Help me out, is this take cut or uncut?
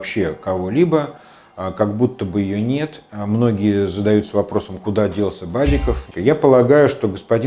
cut